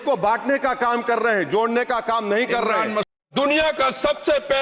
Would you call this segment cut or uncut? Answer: cut